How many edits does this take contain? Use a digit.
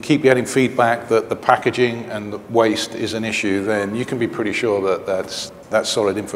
1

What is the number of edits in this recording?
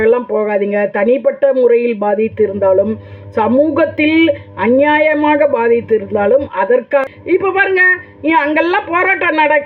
1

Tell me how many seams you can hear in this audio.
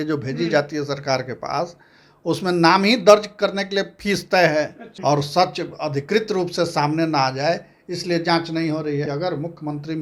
2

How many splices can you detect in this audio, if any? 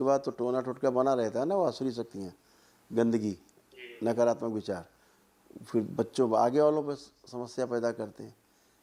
0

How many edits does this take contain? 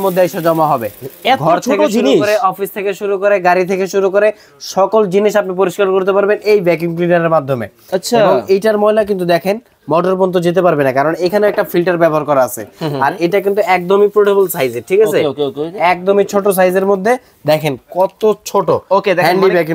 0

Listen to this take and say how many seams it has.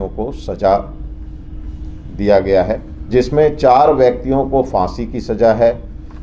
1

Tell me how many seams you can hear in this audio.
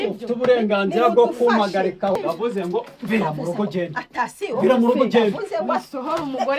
1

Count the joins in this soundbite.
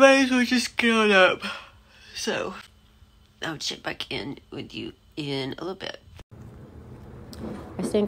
1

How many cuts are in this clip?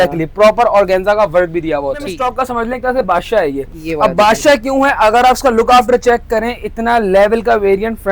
1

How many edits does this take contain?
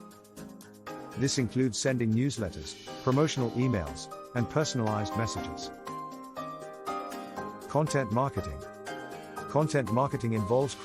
3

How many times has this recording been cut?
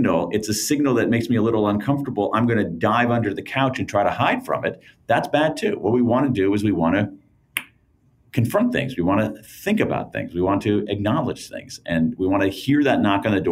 0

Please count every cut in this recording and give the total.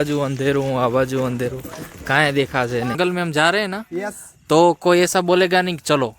1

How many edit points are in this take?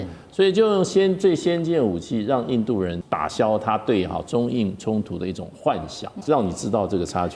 2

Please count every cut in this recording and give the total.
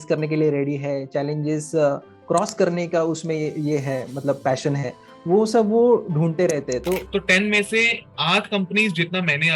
1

